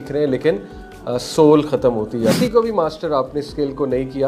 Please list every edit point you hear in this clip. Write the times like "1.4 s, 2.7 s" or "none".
2.4 s